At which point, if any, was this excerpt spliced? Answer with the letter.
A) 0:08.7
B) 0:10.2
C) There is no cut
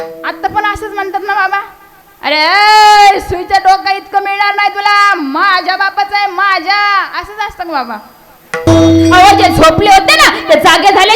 A